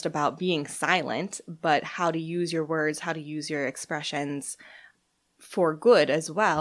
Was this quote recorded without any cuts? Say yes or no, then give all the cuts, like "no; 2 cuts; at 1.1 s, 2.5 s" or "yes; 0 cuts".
no; 1 cut; at 4.9 s